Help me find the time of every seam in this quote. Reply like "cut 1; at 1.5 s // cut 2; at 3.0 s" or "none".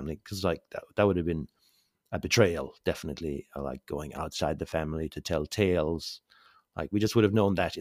none